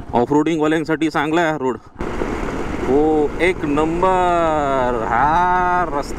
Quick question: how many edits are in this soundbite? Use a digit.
1